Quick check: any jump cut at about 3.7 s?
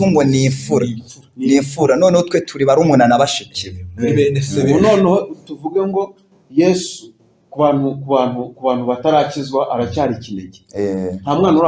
no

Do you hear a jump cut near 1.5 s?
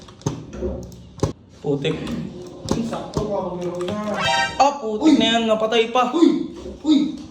yes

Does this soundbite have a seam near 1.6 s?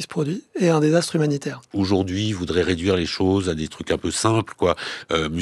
yes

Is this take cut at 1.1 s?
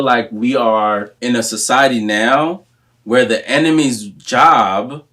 yes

